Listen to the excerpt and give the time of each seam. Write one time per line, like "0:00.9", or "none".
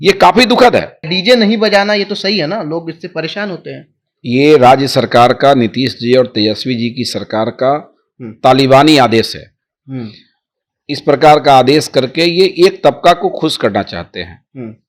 0:01.1